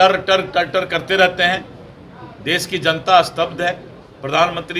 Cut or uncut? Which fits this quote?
uncut